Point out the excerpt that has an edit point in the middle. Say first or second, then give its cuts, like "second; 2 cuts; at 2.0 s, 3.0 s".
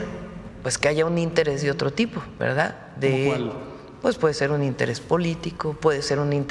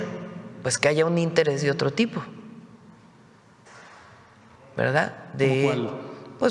first; 1 cut; at 2.2 s